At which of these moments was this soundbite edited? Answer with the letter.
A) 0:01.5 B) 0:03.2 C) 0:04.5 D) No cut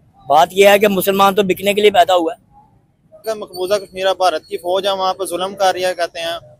B